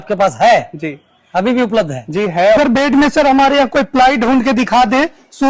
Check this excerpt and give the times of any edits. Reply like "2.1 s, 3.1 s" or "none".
2.6 s